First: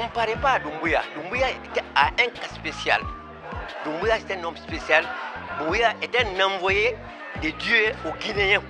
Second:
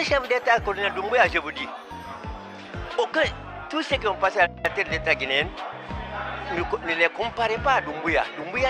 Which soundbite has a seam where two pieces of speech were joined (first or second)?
second